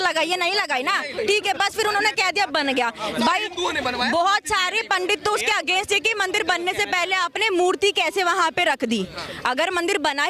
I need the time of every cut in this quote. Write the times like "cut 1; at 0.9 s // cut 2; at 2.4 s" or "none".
none